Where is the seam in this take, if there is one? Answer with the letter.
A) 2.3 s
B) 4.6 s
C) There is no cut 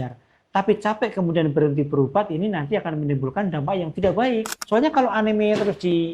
B